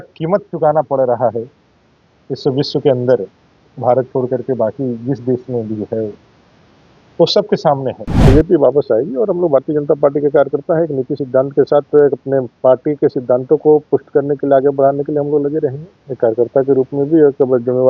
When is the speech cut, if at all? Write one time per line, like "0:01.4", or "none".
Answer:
0:08.3